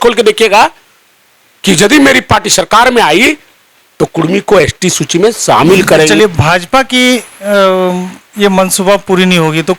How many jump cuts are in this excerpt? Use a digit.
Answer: 1